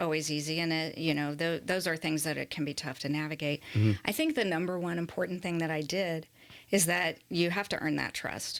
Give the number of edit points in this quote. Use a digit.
0